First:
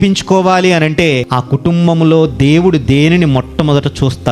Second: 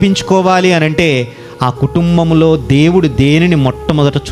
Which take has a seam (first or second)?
first